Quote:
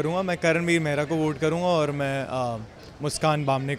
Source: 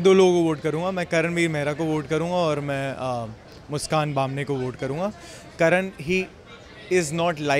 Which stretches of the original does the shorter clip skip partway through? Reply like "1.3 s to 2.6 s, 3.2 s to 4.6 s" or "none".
none